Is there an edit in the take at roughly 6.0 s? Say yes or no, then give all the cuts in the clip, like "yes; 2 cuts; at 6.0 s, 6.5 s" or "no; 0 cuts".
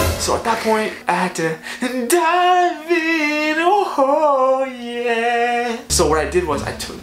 yes; 1 cut; at 6.0 s